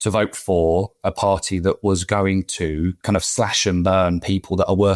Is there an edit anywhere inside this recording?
no; 0 cuts

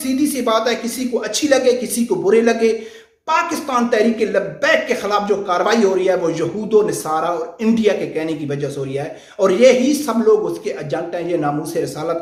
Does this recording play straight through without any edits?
yes; 0 cuts

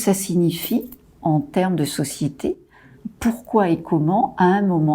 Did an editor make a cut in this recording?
yes; 2 cuts; at 1.2 s, 3.0 s

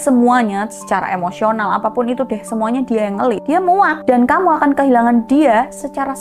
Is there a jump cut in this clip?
no; 0 cuts

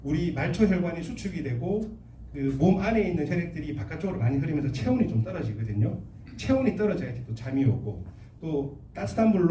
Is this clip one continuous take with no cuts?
yes; 0 cuts

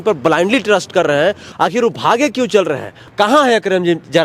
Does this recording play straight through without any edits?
yes; 0 cuts

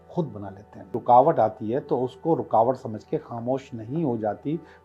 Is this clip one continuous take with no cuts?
no; 1 cut; at 0.9 s

